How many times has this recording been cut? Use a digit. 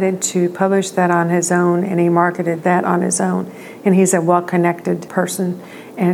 2